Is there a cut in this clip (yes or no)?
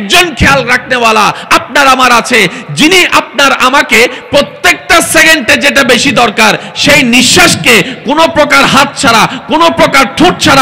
no